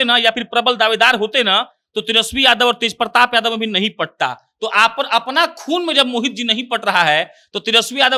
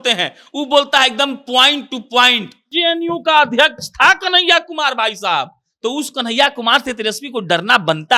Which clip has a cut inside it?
second; 1 cut; at 2.7 s

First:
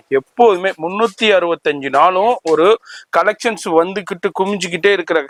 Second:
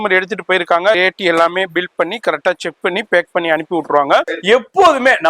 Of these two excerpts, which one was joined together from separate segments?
second; 2 cuts; at 1.0 s, 4.3 s

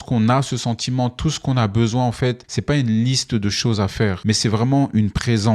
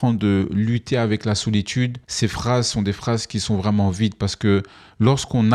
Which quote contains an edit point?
first; 2 cuts; at 2.5 s, 4.2 s

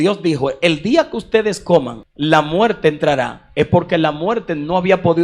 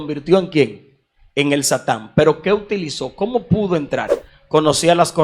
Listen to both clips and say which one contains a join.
first; 1 cut; at 2.0 s

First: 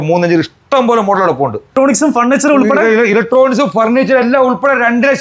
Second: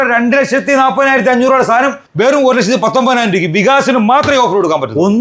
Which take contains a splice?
first; 1 cut; at 1.7 s

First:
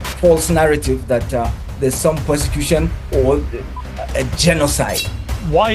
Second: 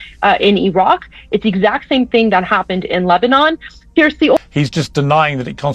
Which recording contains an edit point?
second; 1 cut; at 4.4 s

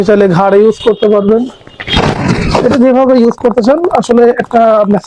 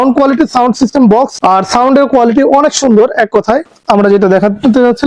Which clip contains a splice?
second; 1 cut; at 3.7 s

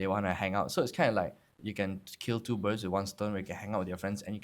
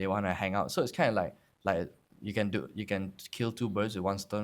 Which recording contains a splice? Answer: first; 1 cut; at 1.6 s

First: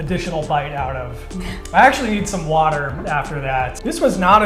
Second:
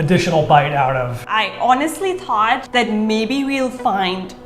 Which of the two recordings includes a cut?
second; 2 cuts; at 1.2 s, 2.6 s

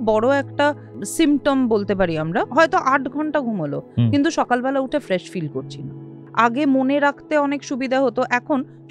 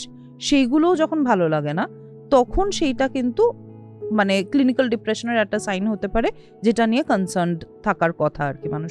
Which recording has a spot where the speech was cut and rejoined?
first; 3 cuts; at 0.9 s, 2.5 s, 6.2 s

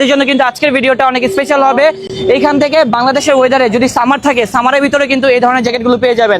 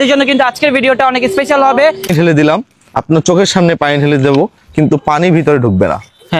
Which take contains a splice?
second; 1 cut; at 2.1 s

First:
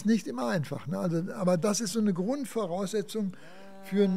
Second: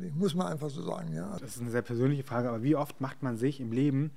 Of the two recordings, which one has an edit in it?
second; 1 cut; at 1.3 s

